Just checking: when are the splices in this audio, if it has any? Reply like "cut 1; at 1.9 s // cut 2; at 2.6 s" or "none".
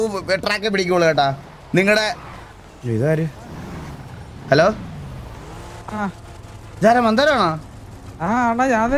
none